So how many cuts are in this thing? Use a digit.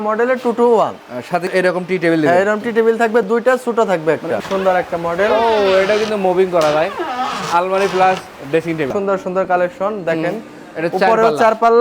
3